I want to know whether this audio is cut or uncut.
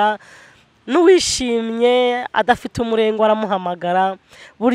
uncut